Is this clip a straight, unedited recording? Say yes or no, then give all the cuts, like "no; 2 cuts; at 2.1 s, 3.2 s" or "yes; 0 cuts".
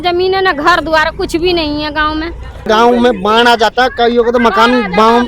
no; 1 cut; at 2.6 s